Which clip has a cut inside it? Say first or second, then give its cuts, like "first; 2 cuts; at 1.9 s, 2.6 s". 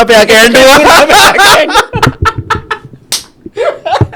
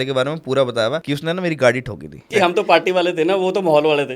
second; 2 cuts; at 1.0 s, 2.2 s